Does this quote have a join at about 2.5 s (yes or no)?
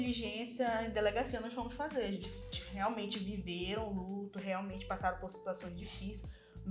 yes